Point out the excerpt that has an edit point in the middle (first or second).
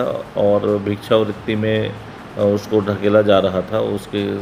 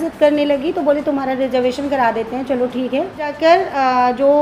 second